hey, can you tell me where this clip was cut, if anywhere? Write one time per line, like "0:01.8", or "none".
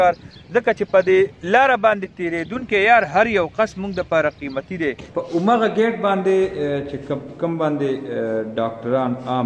0:05.0

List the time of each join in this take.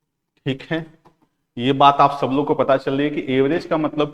none

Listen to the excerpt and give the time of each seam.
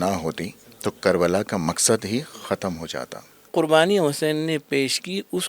0:03.5

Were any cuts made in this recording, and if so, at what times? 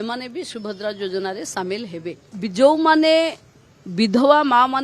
0:02.2

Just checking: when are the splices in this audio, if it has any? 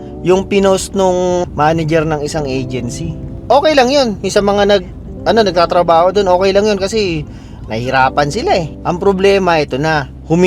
0:01.4
0:08.7

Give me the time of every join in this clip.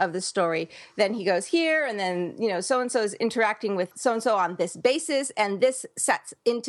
0:03.9

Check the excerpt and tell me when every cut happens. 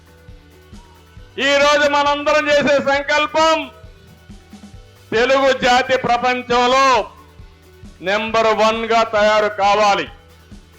0:01.3

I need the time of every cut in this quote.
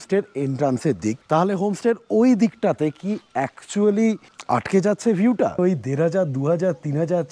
0:01.2
0:04.3
0:05.6

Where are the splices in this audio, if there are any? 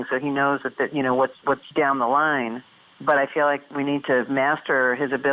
0:01.6
0:03.7

